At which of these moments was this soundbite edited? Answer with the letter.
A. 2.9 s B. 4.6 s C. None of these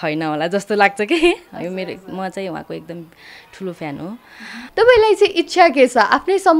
B